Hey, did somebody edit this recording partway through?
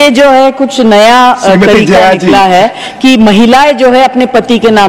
no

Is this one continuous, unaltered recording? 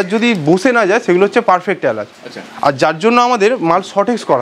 yes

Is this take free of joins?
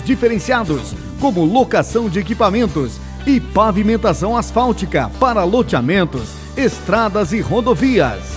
yes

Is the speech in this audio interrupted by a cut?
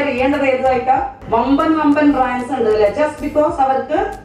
yes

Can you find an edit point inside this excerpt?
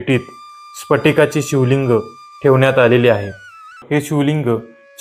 yes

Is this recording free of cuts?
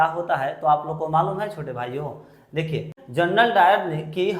no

